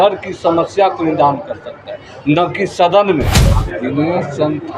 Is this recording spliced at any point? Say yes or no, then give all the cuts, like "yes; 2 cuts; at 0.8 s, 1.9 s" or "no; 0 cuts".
yes; 1 cut; at 3.4 s